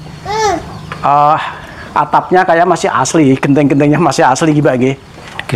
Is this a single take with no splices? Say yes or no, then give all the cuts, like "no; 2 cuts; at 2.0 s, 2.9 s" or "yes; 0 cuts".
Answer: yes; 0 cuts